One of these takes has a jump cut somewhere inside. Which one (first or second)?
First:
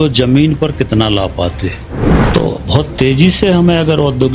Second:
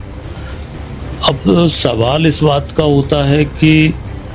first